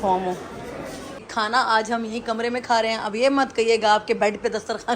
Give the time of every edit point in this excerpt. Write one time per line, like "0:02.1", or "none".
0:01.2

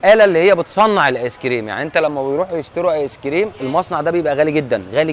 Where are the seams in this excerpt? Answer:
0:03.6

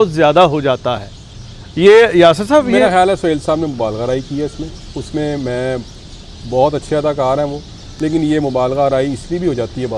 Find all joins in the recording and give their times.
none

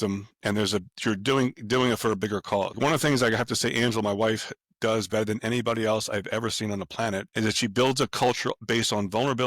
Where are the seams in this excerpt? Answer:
0:02.7
0:07.3
0:08.5

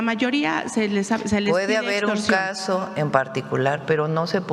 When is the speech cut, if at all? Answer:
none

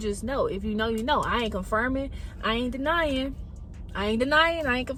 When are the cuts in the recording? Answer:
none

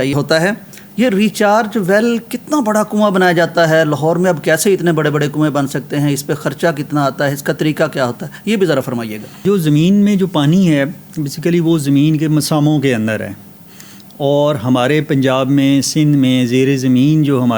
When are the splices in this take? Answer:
none

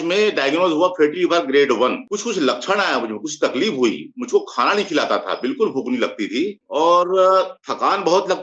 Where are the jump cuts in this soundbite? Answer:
0:02.0
0:06.6

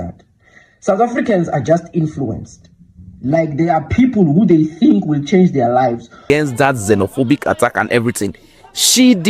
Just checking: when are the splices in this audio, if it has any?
0:06.2

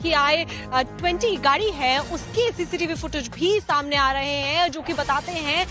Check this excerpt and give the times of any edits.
0:00.9

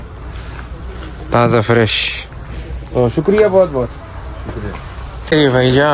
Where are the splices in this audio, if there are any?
none

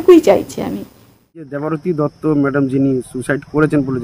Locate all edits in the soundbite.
0:01.6

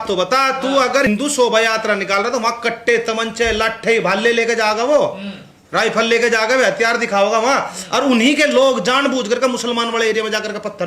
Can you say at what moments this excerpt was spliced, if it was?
0:01.1

